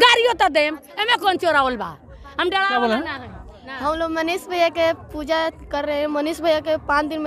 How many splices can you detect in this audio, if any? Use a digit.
0